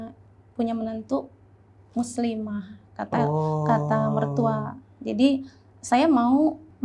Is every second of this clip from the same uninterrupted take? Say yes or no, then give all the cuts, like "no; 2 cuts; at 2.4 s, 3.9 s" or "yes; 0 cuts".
yes; 0 cuts